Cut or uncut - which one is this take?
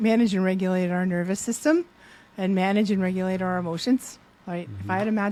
uncut